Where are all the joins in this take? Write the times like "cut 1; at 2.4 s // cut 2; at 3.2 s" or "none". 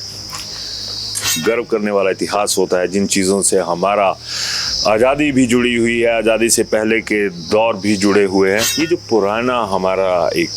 cut 1; at 1.3 s // cut 2; at 8.7 s